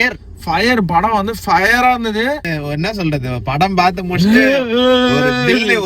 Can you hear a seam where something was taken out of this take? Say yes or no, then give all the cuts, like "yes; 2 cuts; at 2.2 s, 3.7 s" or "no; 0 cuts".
yes; 1 cut; at 2.5 s